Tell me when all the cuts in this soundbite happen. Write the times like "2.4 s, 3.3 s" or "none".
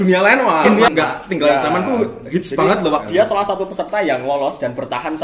0.9 s, 3.1 s

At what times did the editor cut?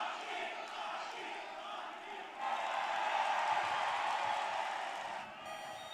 2.4 s, 5.2 s

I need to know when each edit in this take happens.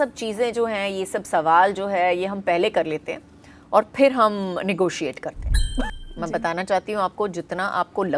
5.8 s

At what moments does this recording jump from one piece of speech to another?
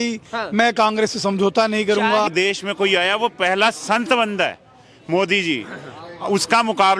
2.3 s

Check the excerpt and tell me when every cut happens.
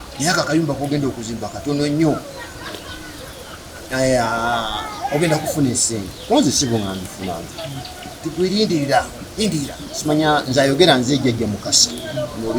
none

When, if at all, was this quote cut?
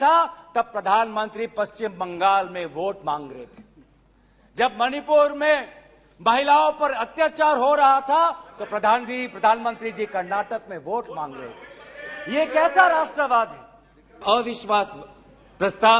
14.2 s

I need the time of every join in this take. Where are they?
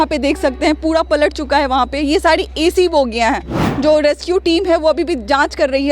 3.6 s

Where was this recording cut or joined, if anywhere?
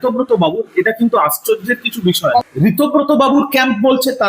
2.4 s

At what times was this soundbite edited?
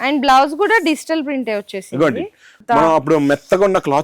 2.5 s

